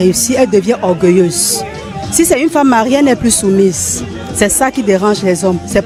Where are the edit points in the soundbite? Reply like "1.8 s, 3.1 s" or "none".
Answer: none